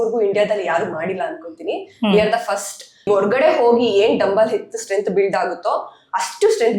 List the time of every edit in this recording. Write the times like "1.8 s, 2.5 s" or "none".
3.1 s